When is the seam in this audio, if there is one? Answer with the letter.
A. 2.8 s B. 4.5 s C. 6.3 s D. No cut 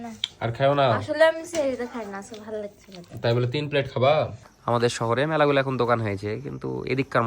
B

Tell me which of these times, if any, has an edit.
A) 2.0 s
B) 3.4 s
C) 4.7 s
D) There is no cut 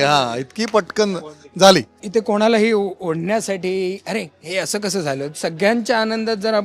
A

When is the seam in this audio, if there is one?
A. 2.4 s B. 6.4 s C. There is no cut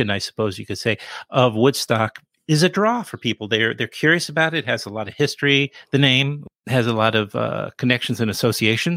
B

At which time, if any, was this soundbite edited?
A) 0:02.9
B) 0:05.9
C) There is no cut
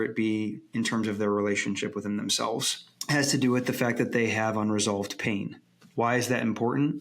A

